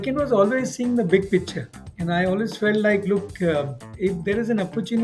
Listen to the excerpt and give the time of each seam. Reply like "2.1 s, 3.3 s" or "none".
3.8 s